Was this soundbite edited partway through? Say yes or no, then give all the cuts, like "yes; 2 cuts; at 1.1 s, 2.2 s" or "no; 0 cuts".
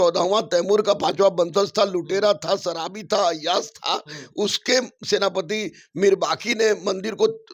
no; 0 cuts